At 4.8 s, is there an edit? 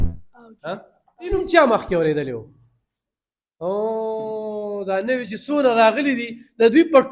no; 1 cut; at 1.3 s

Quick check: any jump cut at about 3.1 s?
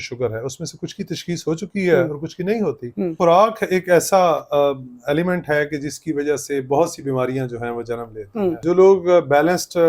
yes; 2 cuts; at 3.1 s, 8.6 s

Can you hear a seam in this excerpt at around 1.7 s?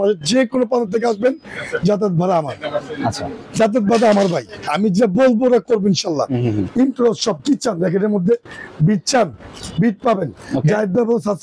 no; 1 cut; at 6.6 s

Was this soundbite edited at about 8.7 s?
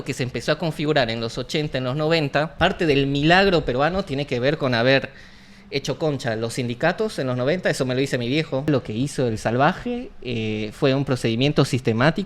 yes; 2 cuts; at 2.5 s, 8.7 s

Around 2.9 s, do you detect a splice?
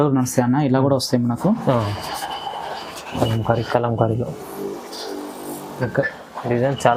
no; 0 cuts

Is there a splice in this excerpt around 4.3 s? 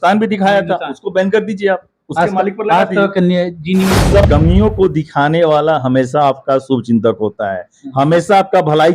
yes; 1 cut; at 4.3 s

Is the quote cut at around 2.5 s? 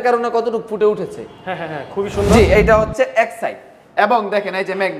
yes; 1 cut; at 2.5 s

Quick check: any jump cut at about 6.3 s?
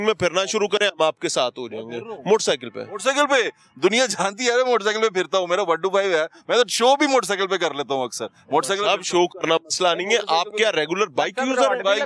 no; 0 cuts

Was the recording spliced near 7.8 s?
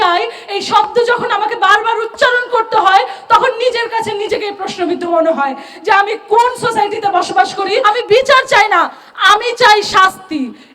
yes; 1 cut; at 7.8 s

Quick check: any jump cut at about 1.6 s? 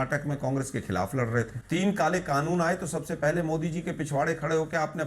yes; 1 cut; at 1.6 s

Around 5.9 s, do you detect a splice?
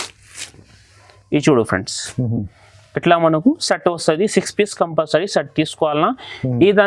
no; 0 cuts

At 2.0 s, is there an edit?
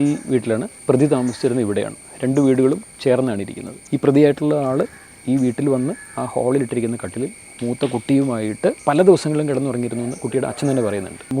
no; 0 cuts

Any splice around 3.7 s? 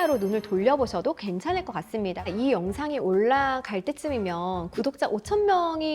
no; 1 cut; at 2.2 s

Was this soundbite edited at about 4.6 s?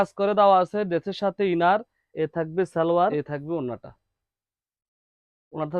no; 2 cuts; at 2.0 s, 3.2 s

